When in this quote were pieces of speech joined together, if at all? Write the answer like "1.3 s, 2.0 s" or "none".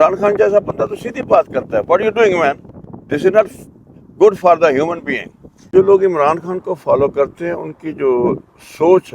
5.7 s